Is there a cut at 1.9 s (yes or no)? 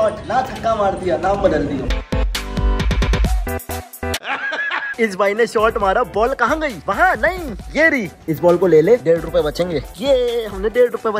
no